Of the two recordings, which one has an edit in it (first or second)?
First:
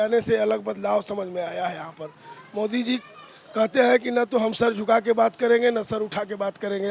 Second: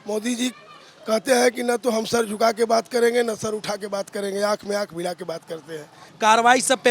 second